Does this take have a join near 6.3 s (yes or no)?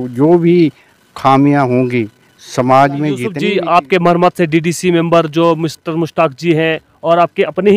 no